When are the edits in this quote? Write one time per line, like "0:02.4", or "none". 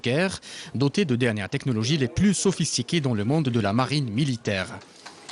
0:02.5